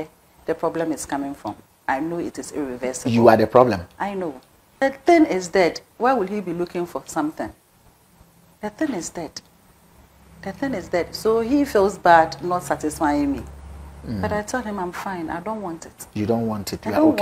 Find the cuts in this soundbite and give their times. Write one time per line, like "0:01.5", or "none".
0:04.8